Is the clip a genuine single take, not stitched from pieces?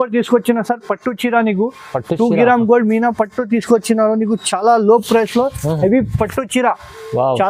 yes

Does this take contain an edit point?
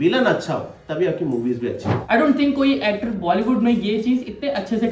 yes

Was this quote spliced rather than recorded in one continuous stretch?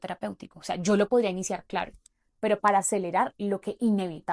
no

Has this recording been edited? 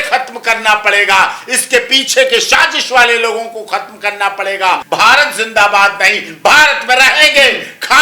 yes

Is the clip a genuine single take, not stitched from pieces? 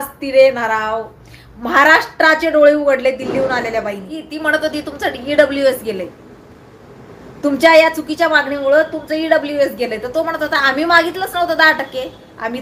no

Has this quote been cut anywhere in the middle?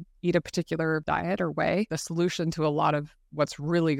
yes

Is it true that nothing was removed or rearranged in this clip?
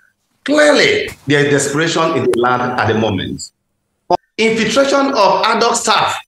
no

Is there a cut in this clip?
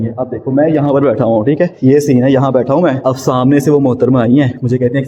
yes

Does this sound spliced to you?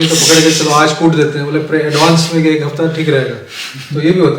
no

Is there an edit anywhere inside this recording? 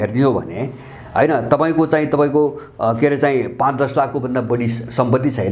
no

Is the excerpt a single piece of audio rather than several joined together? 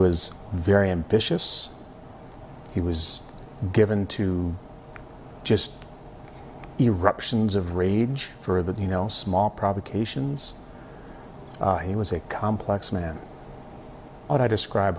no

